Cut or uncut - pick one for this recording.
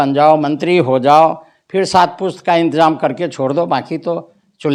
uncut